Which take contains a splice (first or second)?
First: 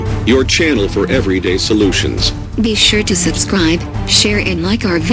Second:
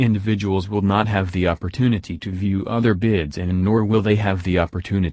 second